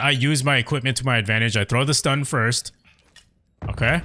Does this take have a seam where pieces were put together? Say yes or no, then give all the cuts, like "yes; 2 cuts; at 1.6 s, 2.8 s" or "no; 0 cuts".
no; 0 cuts